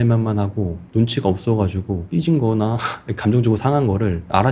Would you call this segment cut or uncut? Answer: cut